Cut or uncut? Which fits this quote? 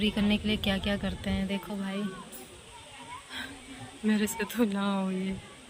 uncut